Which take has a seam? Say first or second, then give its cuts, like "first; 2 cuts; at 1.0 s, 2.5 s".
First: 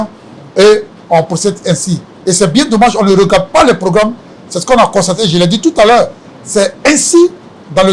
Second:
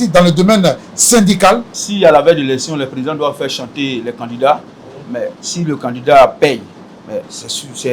second; 1 cut; at 1.7 s